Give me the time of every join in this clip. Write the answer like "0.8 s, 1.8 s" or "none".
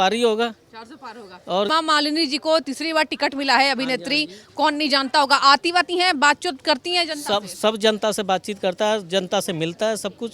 1.7 s